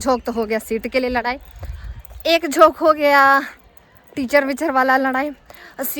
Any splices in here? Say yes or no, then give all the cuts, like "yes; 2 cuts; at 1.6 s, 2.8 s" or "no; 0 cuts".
no; 0 cuts